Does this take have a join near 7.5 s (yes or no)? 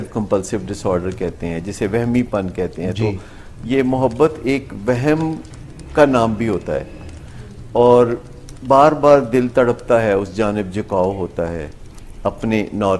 no